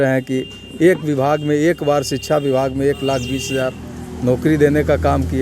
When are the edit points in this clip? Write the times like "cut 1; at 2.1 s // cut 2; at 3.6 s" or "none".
none